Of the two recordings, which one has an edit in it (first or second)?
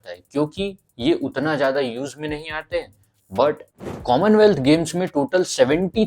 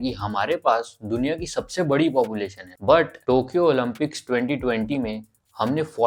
first